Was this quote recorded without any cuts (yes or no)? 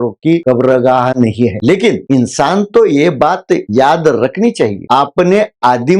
yes